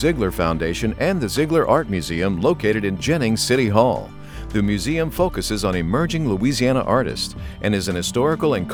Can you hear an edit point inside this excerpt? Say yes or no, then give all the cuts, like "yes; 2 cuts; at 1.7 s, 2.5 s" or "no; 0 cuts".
no; 0 cuts